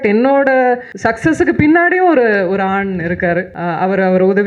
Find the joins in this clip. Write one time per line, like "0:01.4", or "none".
0:00.9
0:03.5